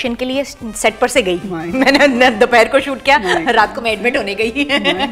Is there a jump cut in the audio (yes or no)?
no